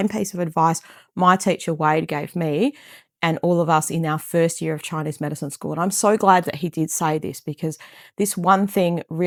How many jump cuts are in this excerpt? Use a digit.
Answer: 0